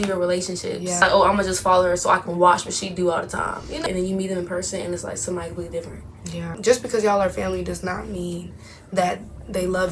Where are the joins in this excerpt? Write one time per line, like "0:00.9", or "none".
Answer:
0:01.0
0:03.8
0:06.5